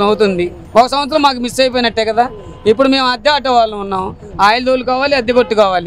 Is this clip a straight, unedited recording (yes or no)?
yes